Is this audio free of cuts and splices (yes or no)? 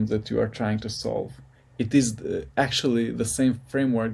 yes